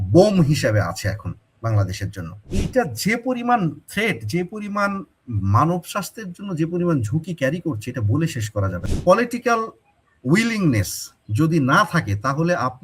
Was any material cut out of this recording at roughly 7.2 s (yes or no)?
no